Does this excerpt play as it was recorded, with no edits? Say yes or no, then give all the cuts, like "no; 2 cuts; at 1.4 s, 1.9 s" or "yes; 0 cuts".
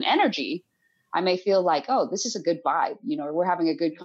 yes; 0 cuts